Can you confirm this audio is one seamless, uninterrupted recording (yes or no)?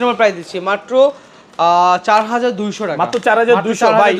yes